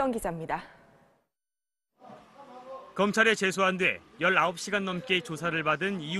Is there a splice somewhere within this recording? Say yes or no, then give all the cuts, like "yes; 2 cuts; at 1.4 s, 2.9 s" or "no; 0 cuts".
no; 0 cuts